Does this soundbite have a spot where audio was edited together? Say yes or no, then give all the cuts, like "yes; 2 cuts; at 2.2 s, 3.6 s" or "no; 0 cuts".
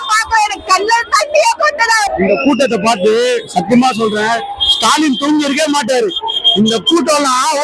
yes; 1 cut; at 2.1 s